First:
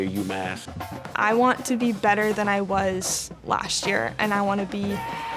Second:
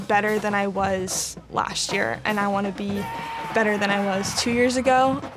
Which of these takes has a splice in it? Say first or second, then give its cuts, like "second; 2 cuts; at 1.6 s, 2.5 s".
first; 1 cut; at 1.0 s